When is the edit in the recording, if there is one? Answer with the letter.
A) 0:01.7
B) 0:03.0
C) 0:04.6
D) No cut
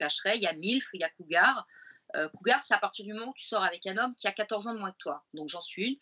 D